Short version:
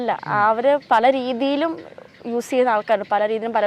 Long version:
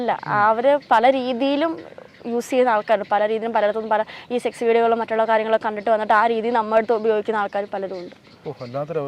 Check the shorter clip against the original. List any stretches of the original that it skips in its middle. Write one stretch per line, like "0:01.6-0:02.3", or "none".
none